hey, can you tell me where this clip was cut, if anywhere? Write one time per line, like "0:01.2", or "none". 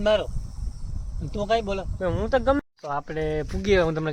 0:02.6